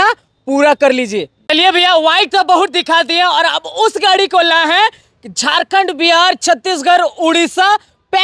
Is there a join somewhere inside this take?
no; 0 cuts

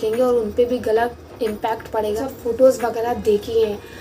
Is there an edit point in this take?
yes; 1 cut; at 2.2 s

